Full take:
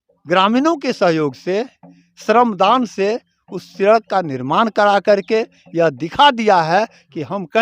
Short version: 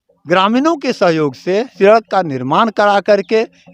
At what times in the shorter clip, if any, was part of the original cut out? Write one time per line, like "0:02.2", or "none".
0:01.7